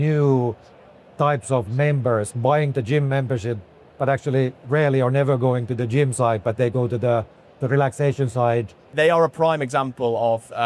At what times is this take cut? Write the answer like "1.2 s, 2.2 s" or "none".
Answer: 8.9 s